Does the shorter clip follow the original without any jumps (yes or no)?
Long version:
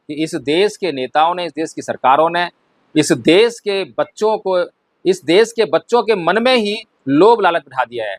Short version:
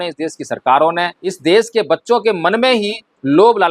no